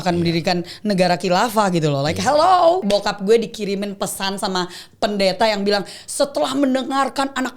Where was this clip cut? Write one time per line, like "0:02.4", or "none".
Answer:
0:02.8

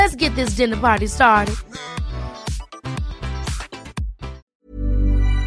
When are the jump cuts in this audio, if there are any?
0:04.4

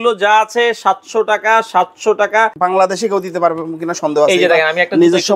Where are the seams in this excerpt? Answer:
0:02.5

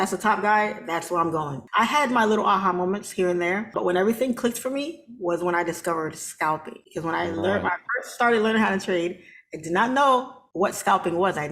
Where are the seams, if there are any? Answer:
0:01.6
0:03.7
0:06.8
0:10.4

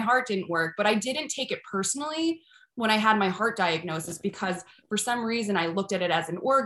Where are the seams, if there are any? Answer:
none

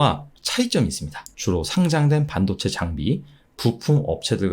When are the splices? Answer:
0:01.2

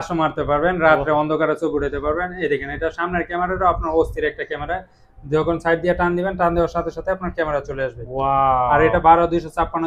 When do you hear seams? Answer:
none

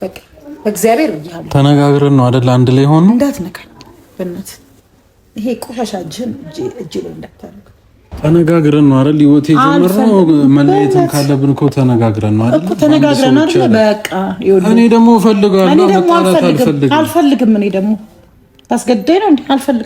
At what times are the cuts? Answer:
0:08.0

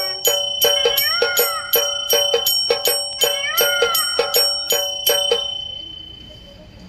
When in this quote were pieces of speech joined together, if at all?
none

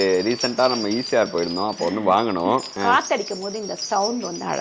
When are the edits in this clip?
0:02.8

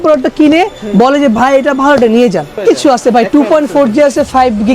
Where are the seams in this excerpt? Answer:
0:02.6

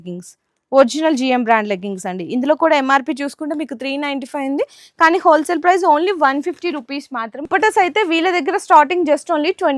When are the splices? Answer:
0:07.3

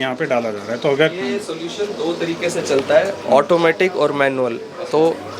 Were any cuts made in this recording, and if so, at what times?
none

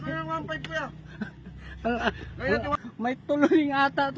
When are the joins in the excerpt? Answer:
0:02.7

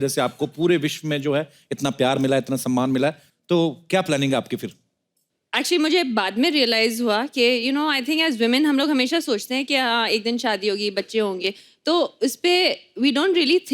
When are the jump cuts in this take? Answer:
0:03.3

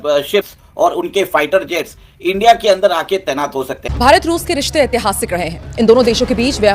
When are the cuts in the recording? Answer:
0:03.8

